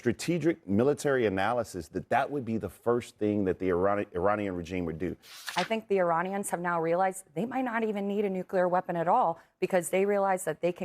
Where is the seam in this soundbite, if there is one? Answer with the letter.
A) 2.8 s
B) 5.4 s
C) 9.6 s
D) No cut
B